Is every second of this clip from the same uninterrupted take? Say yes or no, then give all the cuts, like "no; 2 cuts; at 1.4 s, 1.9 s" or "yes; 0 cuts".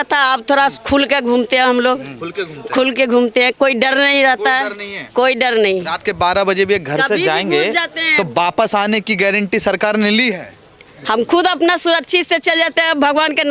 yes; 0 cuts